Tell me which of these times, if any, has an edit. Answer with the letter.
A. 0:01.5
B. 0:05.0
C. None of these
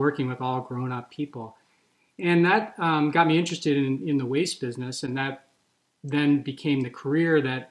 C